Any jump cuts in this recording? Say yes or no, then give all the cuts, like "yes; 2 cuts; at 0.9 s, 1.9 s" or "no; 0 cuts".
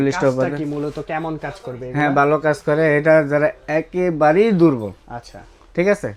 no; 0 cuts